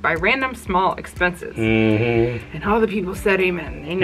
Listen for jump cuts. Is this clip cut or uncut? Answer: uncut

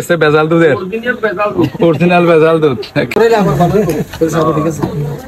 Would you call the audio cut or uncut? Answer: cut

